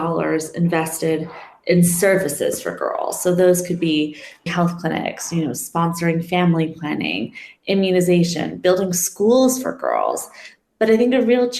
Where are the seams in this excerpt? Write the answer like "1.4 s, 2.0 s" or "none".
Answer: 4.5 s

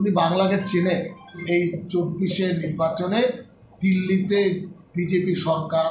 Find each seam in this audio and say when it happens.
1.4 s

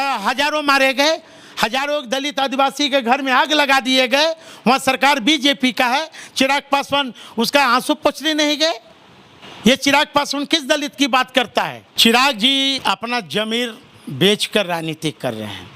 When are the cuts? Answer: 11.8 s, 12.8 s

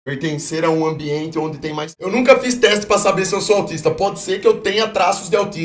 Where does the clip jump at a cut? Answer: 2.0 s

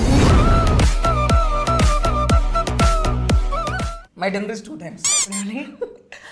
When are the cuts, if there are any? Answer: 3.9 s

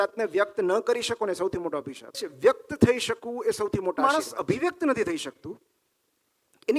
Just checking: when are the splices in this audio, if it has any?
2.3 s, 4.0 s

